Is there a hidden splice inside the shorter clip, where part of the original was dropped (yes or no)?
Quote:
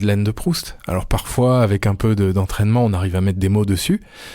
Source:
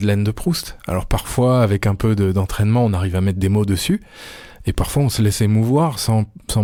no